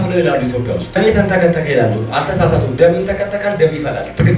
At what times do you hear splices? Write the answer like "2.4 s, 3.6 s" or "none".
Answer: 1.0 s